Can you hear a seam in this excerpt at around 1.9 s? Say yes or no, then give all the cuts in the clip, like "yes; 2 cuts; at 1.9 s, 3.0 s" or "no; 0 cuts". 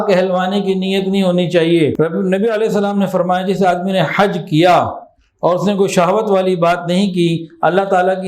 yes; 1 cut; at 1.9 s